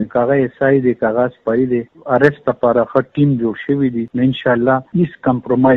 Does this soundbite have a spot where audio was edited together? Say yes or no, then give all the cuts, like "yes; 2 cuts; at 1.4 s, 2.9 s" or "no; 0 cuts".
yes; 3 cuts; at 1.9 s, 4.1 s, 4.9 s